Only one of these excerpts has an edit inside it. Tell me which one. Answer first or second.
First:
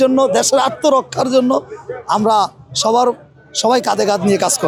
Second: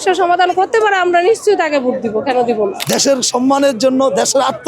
second